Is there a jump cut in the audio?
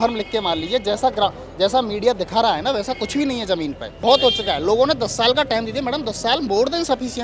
yes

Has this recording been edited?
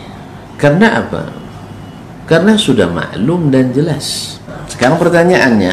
yes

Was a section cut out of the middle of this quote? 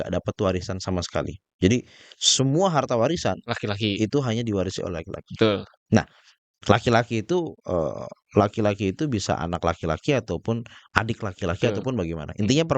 no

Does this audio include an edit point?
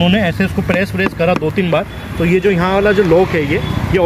no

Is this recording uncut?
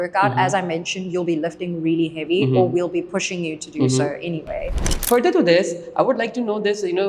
no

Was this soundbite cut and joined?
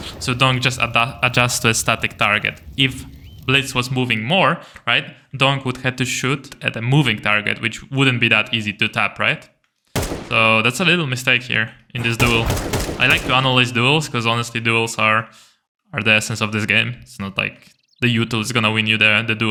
no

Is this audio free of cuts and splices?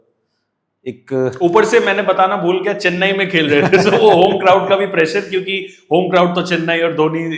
yes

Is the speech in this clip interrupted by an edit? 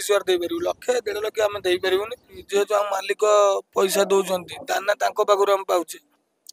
yes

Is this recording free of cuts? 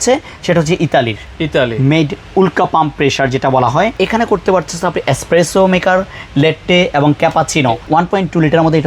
no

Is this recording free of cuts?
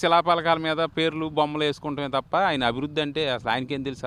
yes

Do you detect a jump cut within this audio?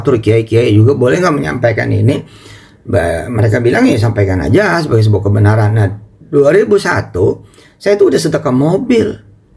no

